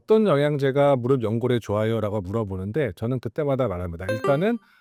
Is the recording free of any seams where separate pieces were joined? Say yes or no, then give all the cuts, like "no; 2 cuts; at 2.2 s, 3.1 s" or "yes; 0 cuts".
yes; 0 cuts